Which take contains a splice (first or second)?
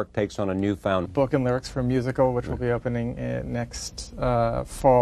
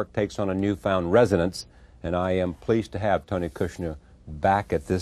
second